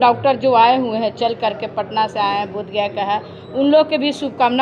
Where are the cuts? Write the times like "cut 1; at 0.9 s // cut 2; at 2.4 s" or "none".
none